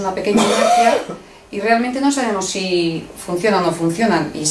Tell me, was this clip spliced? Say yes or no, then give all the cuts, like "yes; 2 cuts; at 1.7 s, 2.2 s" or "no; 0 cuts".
yes; 1 cut; at 3.5 s